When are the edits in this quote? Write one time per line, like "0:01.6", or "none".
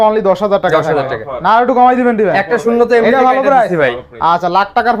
none